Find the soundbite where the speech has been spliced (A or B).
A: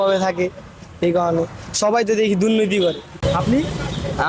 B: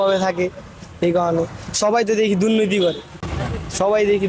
A